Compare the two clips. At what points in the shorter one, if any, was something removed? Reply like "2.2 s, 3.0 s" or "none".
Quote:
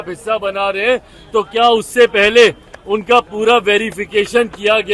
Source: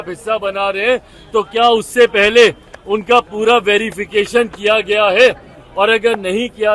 none